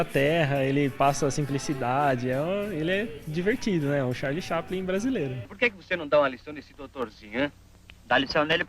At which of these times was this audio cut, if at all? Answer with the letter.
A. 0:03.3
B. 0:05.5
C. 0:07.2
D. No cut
B